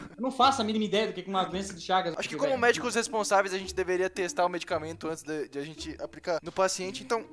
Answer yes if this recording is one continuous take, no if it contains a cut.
no